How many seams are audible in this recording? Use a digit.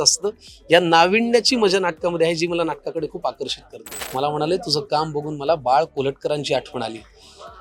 1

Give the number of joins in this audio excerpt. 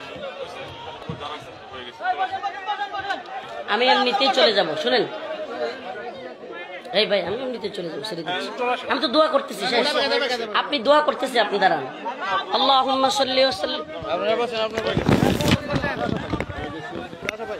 1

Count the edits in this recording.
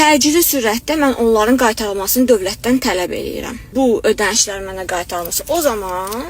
1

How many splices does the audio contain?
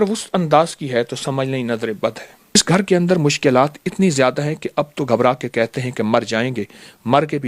1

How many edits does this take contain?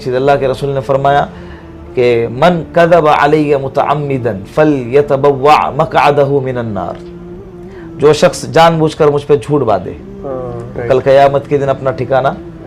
0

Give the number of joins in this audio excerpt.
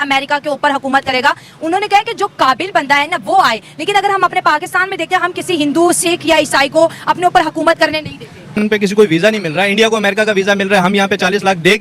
1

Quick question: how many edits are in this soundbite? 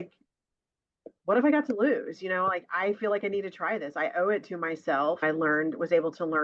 1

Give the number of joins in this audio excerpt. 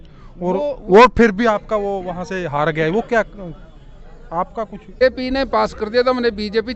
1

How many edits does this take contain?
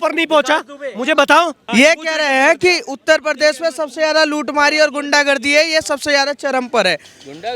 1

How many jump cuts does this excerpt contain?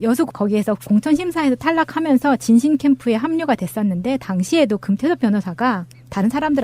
1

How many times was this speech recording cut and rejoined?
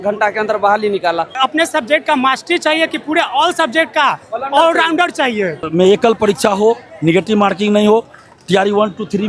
2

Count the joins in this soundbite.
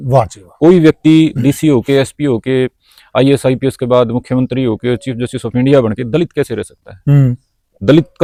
0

